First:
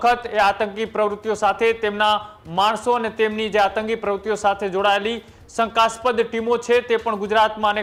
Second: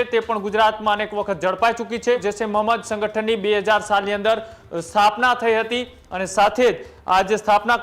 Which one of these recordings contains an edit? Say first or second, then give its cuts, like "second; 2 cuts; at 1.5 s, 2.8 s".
second; 1 cut; at 2.2 s